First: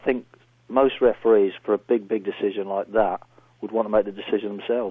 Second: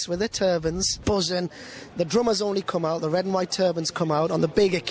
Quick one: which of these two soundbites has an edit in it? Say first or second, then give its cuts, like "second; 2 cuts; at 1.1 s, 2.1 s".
second; 2 cuts; at 0.9 s, 1.8 s